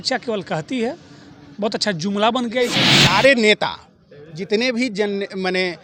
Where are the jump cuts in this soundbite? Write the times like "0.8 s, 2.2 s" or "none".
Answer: 2.9 s

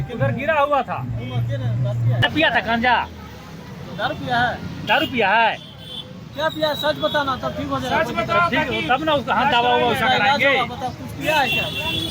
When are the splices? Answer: 2.2 s

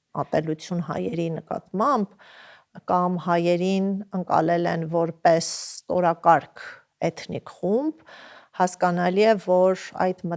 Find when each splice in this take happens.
none

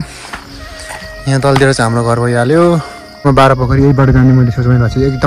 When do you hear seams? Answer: 3.2 s

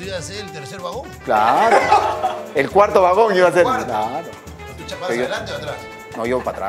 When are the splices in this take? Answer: none

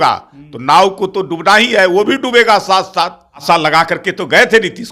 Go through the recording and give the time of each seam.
3.4 s

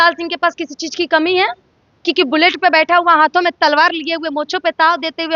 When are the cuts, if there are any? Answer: none

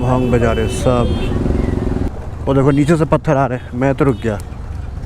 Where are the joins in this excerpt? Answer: 2.1 s

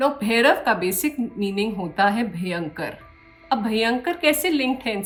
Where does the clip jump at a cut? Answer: none

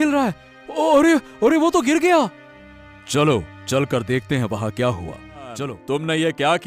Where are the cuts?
5.7 s

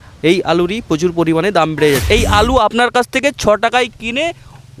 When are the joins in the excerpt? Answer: 2.0 s

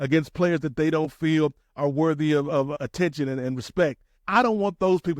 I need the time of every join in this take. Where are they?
2.7 s, 4.1 s

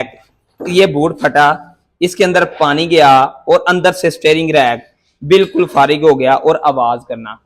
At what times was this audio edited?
none

